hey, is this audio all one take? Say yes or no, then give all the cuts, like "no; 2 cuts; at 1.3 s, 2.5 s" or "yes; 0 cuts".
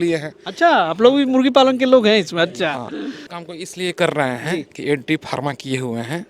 no; 1 cut; at 3.3 s